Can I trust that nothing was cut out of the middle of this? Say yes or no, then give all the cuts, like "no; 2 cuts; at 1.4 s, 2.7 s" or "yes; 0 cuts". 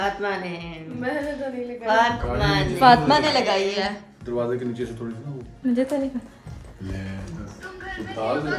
yes; 0 cuts